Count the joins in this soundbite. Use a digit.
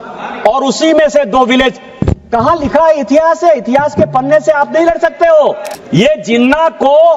1